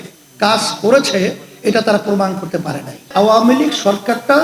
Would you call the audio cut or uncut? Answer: cut